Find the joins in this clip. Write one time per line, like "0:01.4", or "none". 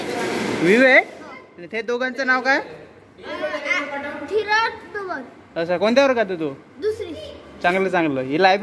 none